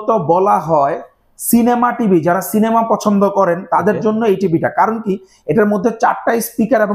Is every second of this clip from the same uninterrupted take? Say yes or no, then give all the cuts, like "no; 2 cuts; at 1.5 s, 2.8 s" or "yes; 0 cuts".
yes; 0 cuts